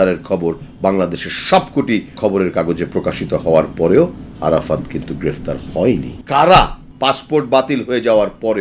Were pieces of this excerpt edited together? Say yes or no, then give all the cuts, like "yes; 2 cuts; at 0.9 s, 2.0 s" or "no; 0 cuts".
yes; 4 cuts; at 2.2 s, 4.3 s, 6.2 s, 6.8 s